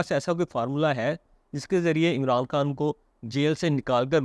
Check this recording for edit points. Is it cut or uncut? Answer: uncut